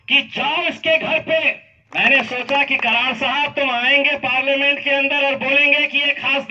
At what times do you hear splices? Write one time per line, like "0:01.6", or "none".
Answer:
0:01.9